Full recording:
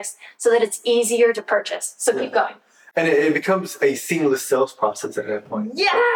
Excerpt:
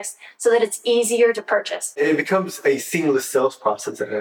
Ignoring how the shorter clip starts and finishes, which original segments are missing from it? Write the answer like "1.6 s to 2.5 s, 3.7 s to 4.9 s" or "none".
2.0 s to 3.2 s